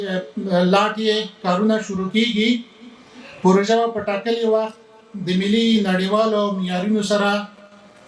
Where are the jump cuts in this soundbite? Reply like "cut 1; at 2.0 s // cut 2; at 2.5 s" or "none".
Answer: none